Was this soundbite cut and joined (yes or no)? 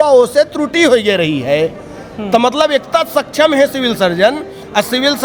no